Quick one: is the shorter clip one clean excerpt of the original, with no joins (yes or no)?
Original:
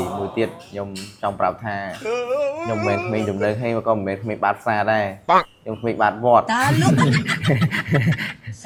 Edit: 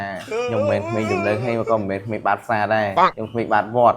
no